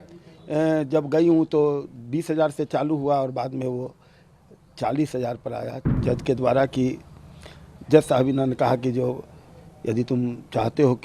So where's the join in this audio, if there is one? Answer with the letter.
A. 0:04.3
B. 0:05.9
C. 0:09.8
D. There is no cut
B